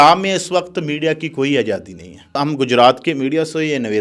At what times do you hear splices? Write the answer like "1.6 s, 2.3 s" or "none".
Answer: 2.4 s